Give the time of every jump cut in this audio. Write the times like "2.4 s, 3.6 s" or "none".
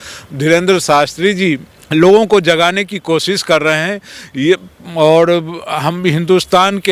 1.7 s